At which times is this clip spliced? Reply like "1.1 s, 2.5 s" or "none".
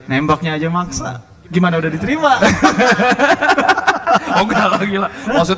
none

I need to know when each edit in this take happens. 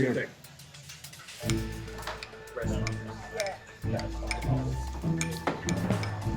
none

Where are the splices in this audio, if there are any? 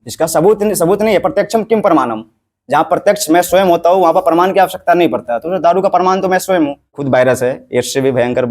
6.9 s

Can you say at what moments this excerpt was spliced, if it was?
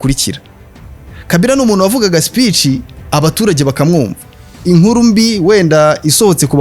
4.5 s

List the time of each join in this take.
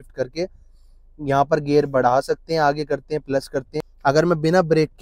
3.8 s

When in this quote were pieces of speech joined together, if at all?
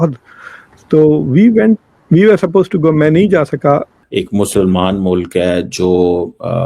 4.0 s

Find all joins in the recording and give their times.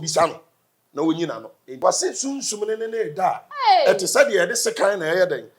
1.6 s

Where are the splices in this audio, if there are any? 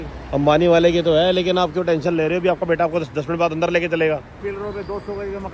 4.4 s

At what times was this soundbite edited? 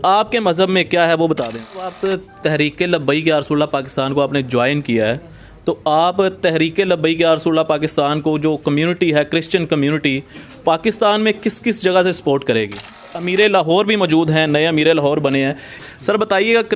1.9 s, 13.1 s, 15.8 s

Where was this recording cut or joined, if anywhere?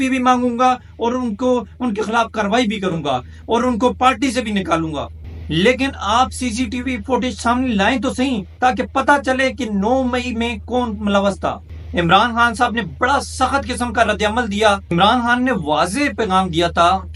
none

